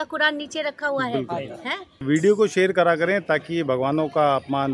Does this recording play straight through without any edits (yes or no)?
no